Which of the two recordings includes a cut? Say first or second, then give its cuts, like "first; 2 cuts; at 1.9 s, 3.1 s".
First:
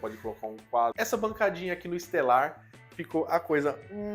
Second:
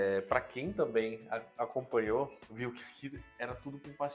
first; 1 cut; at 0.9 s